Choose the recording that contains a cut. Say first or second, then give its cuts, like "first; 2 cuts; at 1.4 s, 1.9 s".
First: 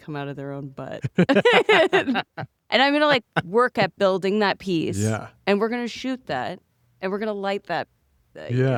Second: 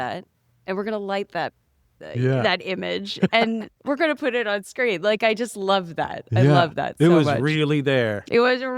second; 1 cut; at 3.7 s